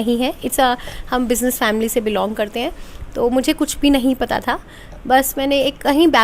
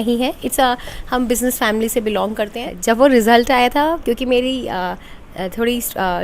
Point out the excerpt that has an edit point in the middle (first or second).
second